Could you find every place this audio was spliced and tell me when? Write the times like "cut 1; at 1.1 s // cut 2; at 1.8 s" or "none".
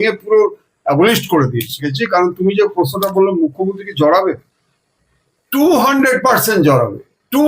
cut 1; at 1.9 s